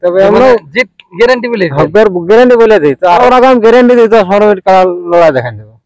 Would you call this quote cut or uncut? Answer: cut